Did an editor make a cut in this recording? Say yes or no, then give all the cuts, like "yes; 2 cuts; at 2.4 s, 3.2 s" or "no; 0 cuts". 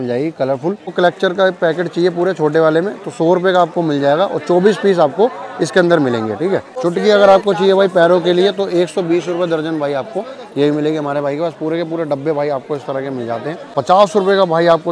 yes; 3 cuts; at 0.9 s, 6.7 s, 13.7 s